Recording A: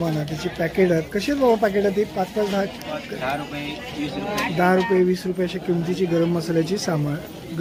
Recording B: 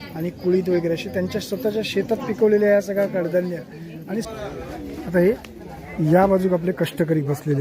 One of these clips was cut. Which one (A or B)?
B